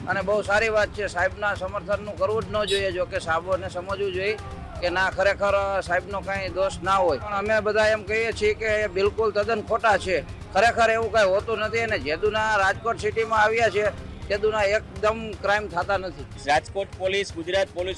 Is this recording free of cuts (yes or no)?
no